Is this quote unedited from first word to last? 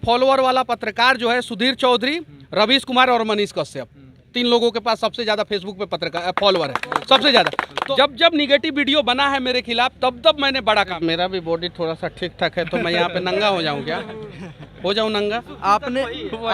no; 3 cuts; at 7.7 s, 10.9 s, 15.4 s

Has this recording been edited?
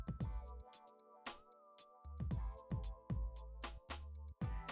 no; 0 cuts

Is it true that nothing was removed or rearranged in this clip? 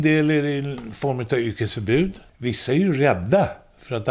no; 1 cut; at 2.3 s

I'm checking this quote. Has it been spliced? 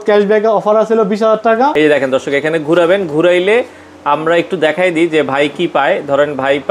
yes; 1 cut; at 1.7 s

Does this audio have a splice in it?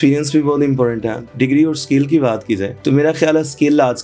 yes; 1 cut; at 1.3 s

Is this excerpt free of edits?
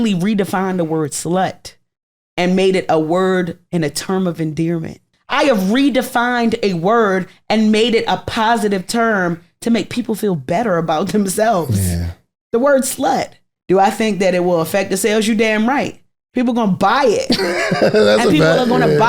no; 2 cuts; at 5.2 s, 13.5 s

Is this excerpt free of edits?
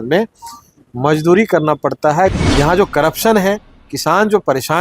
no; 1 cut; at 2.3 s

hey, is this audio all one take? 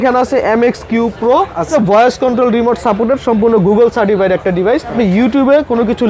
no; 2 cuts; at 1.7 s, 4.9 s

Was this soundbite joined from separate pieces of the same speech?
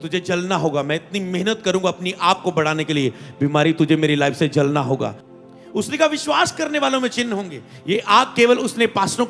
yes; 1 cut; at 5.2 s

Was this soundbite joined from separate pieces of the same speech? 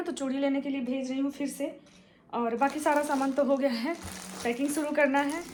no; 0 cuts

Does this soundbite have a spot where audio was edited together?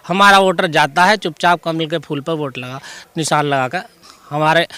no; 0 cuts

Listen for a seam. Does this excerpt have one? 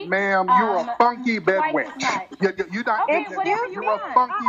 no; 0 cuts

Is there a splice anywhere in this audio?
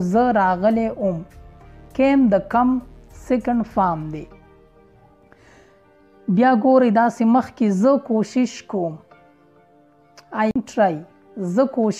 yes; 1 cut; at 10.5 s

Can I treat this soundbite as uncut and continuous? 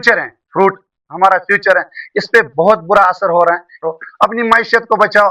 no; 1 cut; at 3.8 s

